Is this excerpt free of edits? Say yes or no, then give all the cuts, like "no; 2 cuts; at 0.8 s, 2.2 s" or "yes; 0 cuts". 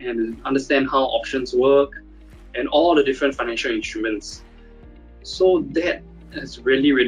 yes; 0 cuts